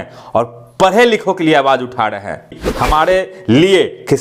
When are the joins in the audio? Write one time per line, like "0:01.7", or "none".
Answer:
0:02.5